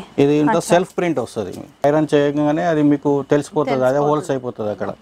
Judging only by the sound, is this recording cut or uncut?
cut